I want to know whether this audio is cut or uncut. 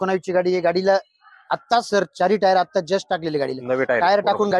uncut